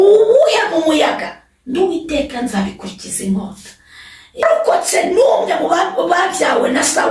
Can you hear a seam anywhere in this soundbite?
yes; 1 cut; at 4.4 s

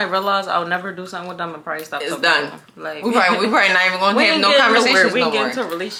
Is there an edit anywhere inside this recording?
no; 0 cuts

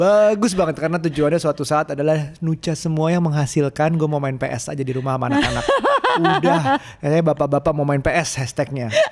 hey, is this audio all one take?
yes; 0 cuts

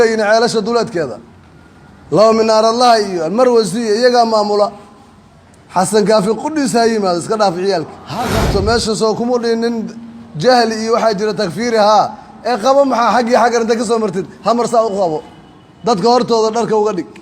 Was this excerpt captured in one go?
no; 1 cut; at 8.3 s

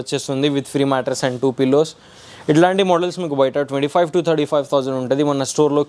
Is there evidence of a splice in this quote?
no; 0 cuts

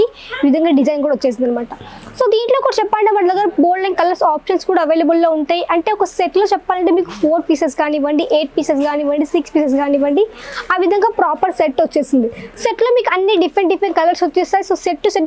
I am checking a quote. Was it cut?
no; 0 cuts

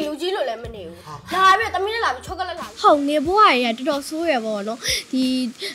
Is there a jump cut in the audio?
yes; 1 cut; at 2.6 s

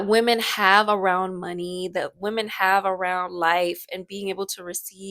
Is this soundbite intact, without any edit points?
yes; 0 cuts

